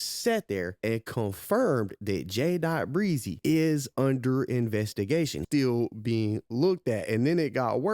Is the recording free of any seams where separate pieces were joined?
no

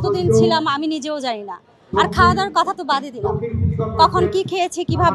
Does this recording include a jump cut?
no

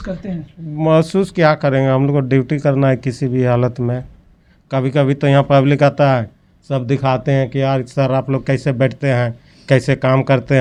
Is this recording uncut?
yes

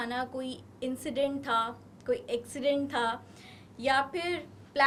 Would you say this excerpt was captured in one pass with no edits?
yes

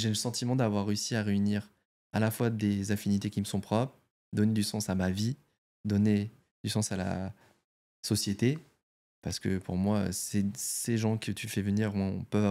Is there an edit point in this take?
no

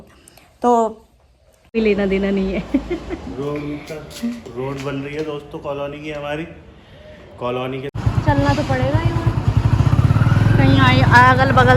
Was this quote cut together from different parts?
yes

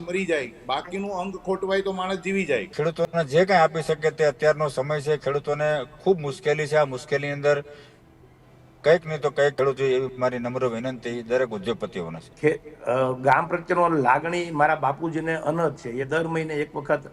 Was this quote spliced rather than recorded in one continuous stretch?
yes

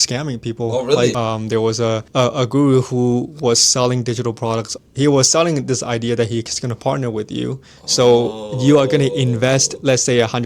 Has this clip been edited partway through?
yes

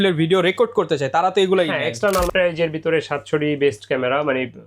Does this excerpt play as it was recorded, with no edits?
no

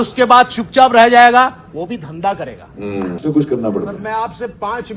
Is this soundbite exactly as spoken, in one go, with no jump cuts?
no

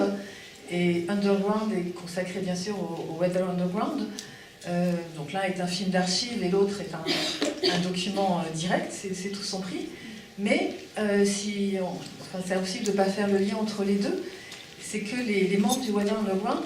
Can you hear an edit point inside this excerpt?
yes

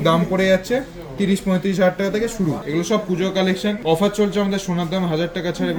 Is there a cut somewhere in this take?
yes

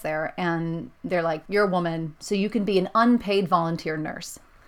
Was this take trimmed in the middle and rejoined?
yes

